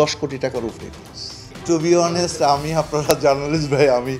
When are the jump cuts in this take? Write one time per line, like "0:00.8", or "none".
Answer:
none